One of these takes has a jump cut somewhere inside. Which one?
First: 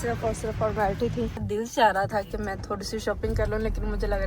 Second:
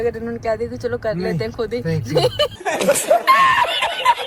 first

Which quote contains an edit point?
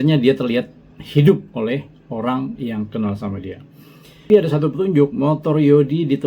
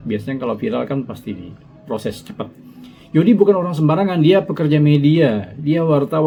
first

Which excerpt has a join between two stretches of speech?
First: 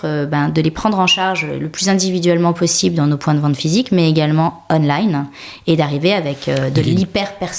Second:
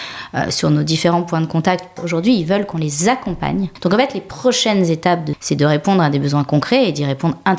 second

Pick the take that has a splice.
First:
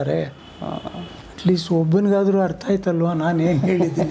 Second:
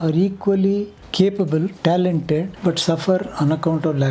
second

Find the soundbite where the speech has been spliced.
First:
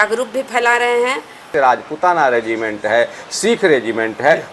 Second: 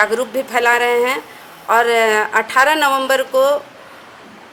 first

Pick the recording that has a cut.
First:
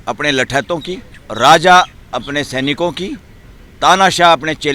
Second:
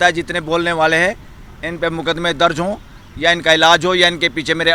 first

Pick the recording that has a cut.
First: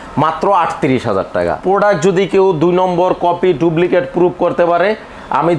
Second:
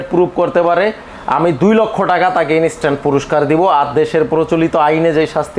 first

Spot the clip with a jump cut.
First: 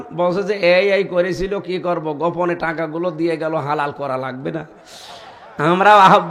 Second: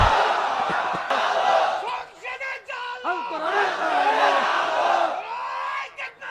second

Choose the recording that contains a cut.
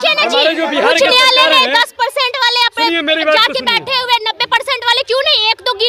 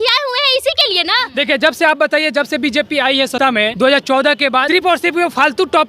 second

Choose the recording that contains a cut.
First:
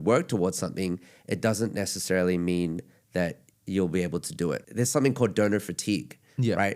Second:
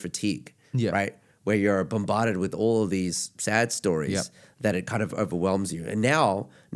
first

